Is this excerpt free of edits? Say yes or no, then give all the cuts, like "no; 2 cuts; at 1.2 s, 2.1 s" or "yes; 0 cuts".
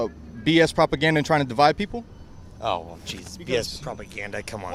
yes; 0 cuts